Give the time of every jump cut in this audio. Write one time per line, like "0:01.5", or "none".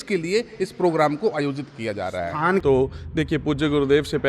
0:02.6